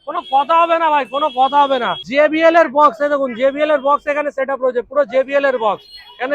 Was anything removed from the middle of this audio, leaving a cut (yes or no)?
yes